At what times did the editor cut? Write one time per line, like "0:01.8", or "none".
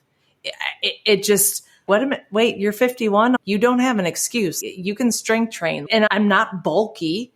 0:01.8
0:03.4
0:04.6
0:06.0